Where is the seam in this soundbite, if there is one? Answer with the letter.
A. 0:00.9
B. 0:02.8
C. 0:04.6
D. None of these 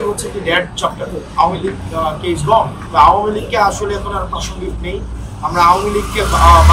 B